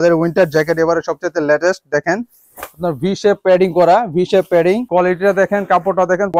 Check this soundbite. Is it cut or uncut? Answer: uncut